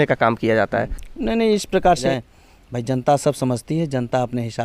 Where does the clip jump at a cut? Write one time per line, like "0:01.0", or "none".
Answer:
0:01.0
0:02.0